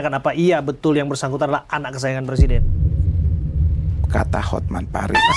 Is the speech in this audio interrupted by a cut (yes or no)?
no